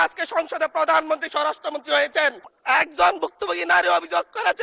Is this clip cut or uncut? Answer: cut